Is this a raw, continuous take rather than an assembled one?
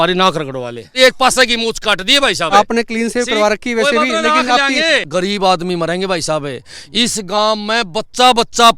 no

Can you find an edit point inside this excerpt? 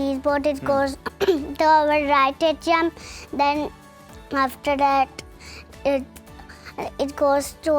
no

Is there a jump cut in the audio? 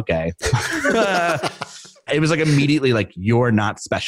yes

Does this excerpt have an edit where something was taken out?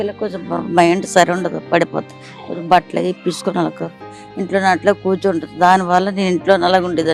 no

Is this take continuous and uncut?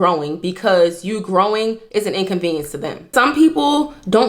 no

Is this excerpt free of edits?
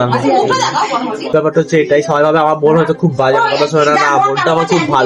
no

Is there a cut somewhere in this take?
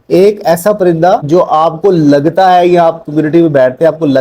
yes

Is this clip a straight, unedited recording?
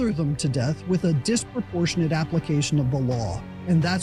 yes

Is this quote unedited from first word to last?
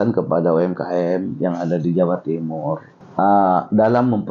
no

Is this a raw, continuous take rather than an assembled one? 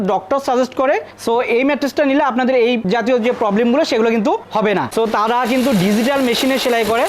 no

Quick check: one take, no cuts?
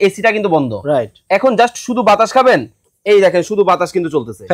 yes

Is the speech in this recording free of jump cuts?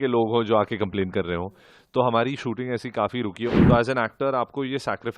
no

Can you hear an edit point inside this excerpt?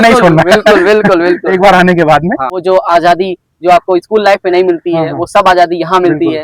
yes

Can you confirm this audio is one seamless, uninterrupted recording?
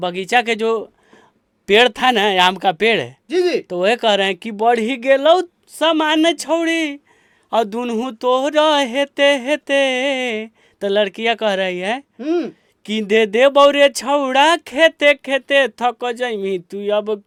yes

